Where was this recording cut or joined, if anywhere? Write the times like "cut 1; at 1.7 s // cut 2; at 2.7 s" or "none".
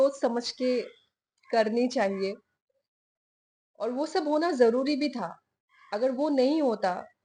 none